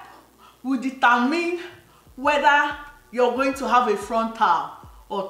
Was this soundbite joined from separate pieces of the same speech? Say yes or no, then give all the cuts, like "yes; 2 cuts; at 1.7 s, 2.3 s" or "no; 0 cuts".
no; 0 cuts